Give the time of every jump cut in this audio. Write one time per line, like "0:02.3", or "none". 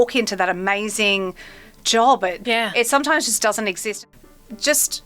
0:02.4
0:03.9